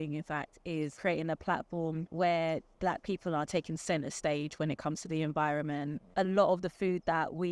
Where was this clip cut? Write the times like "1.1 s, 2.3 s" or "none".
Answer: 0.9 s, 2.1 s, 2.7 s, 6.1 s